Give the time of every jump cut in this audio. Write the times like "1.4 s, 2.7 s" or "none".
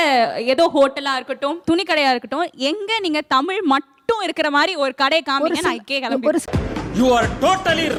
none